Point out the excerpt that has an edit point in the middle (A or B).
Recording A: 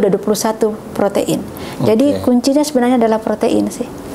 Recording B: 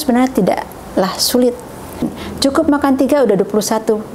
B